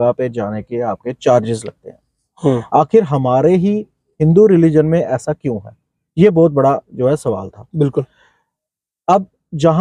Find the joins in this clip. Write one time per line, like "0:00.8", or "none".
none